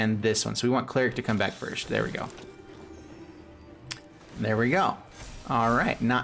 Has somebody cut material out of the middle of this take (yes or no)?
no